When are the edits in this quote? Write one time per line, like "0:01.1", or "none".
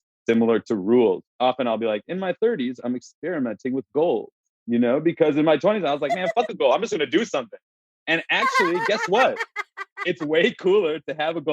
0:01.3